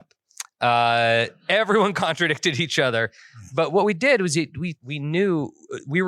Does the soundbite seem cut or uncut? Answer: cut